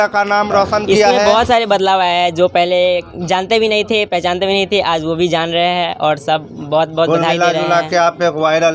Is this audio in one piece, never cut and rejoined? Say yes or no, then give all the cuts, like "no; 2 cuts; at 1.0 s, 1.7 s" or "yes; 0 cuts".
no; 1 cut; at 1.2 s